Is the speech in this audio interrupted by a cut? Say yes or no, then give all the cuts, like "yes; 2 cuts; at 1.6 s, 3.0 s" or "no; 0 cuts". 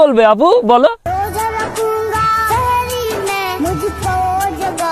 yes; 1 cut; at 1.0 s